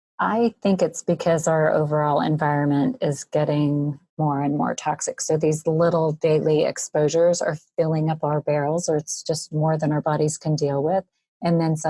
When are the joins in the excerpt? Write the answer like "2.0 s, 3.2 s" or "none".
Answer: 4.0 s

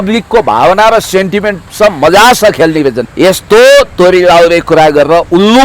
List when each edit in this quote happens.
3.0 s

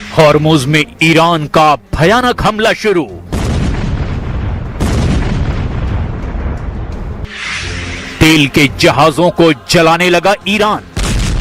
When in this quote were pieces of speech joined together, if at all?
none

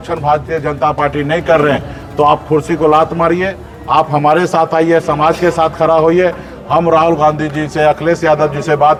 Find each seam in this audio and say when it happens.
none

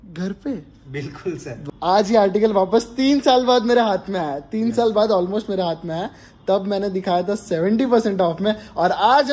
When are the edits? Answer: 1.6 s

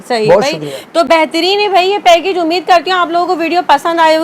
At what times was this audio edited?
none

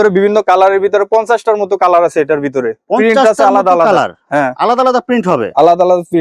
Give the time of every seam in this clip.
none

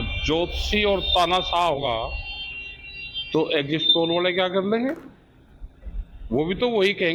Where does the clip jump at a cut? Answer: 1.9 s

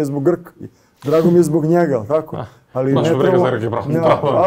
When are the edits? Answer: none

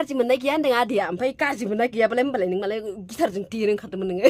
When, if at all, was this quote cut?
none

